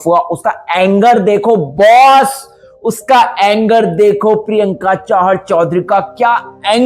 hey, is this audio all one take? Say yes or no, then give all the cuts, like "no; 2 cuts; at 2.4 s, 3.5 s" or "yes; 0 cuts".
yes; 0 cuts